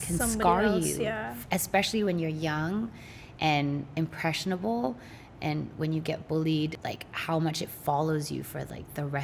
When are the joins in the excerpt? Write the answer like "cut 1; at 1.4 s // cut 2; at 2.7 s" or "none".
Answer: cut 1; at 6.8 s